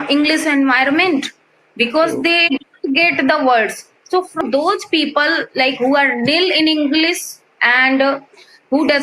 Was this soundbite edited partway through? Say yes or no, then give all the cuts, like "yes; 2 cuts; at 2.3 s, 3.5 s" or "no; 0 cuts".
yes; 1 cut; at 4.4 s